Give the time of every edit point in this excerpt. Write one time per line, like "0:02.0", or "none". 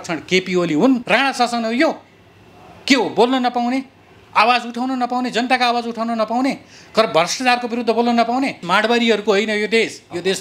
0:01.0
0:08.6